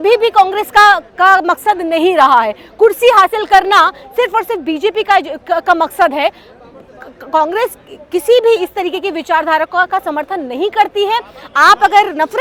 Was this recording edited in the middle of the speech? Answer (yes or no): no